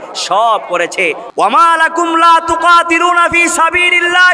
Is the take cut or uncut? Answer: cut